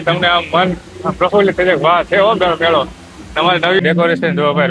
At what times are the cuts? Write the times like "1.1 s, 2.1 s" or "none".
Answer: 3.8 s